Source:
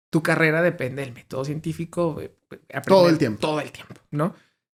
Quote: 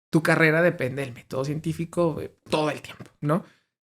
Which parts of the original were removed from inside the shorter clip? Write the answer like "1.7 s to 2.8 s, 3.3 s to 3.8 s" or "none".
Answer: 2.5 s to 3.4 s